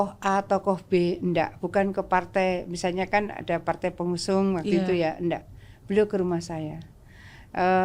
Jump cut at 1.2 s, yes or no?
no